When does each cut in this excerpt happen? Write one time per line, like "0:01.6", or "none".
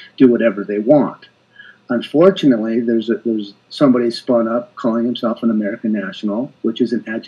none